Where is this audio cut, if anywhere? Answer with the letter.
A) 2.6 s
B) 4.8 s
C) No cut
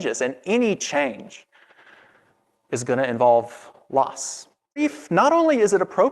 B